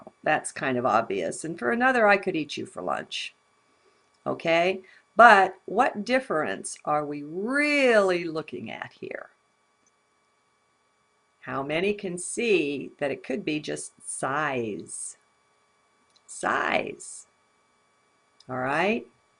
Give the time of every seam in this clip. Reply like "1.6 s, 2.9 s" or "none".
16.2 s